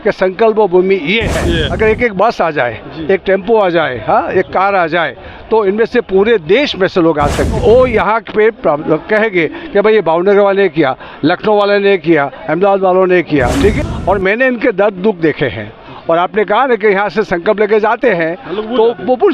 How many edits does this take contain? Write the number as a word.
three